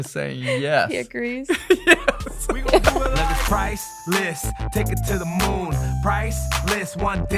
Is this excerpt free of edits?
no; 1 cut; at 3.0 s

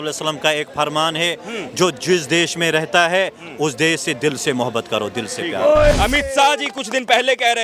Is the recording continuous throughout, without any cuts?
no; 1 cut; at 5.9 s

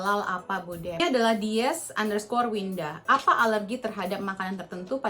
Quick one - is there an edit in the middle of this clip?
yes; 1 cut; at 1.0 s

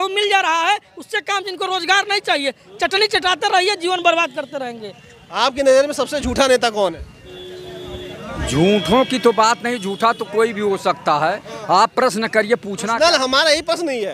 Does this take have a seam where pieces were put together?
no; 0 cuts

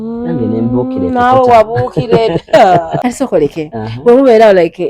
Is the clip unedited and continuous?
no; 1 cut; at 2.9 s

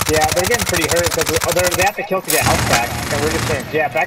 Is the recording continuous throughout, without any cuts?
yes; 0 cuts

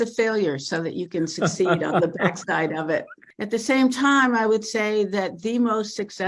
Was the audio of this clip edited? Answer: yes; 1 cut; at 3.2 s

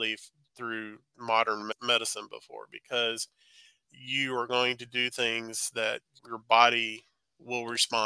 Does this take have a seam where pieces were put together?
yes; 2 cuts; at 1.7 s, 6.2 s

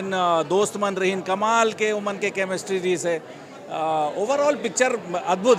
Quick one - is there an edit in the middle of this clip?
no; 0 cuts

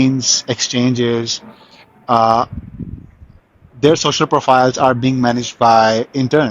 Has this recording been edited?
no; 0 cuts

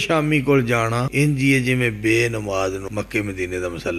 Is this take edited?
yes; 2 cuts; at 1.0 s, 2.9 s

